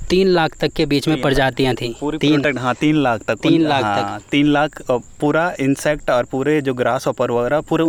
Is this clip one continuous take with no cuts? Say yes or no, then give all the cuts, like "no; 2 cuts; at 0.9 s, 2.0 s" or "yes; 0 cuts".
yes; 0 cuts